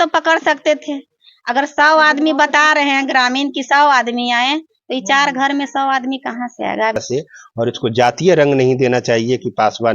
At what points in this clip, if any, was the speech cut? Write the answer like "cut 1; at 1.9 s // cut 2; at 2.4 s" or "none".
cut 1; at 7.0 s